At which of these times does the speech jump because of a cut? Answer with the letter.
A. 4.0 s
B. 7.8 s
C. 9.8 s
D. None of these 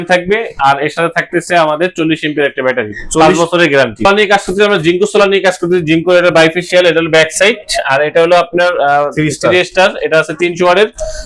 A